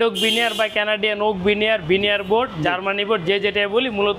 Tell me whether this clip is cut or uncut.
uncut